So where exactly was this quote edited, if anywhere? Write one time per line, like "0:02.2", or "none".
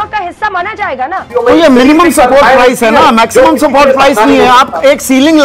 0:01.2